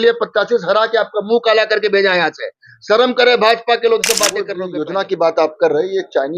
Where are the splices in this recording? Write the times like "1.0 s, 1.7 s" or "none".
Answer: 4.6 s